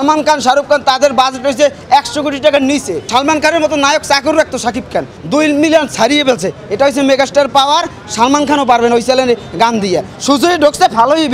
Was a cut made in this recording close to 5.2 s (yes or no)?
yes